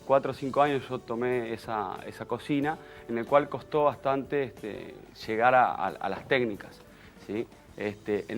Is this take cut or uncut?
uncut